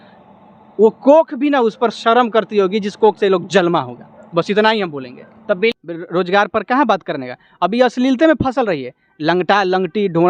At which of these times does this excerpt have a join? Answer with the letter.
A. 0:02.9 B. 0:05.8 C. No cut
B